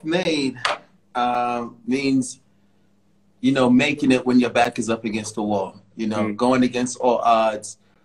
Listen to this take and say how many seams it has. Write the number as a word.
zero